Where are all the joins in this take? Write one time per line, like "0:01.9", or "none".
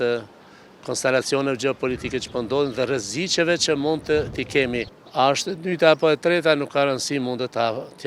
0:04.9